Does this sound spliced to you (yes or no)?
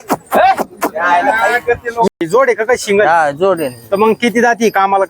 yes